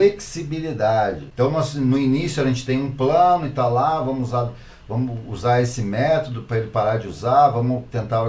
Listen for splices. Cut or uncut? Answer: cut